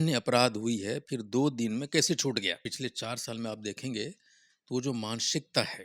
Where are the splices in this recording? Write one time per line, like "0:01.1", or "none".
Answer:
0:02.6